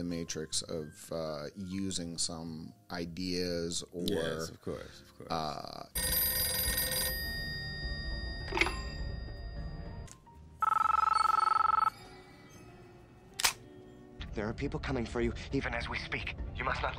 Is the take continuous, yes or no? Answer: no